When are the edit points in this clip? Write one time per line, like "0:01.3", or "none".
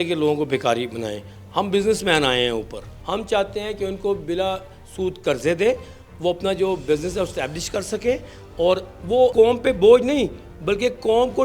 0:02.9
0:09.3